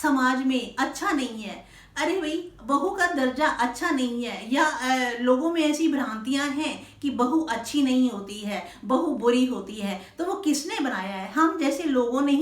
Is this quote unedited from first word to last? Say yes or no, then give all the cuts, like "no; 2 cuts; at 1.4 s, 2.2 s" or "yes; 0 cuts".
yes; 0 cuts